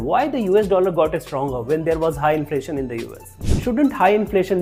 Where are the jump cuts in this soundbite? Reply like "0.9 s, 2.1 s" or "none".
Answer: none